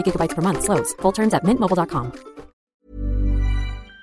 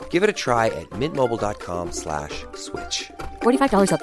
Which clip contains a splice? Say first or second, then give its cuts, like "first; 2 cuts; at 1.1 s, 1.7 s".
first; 1 cut; at 2.7 s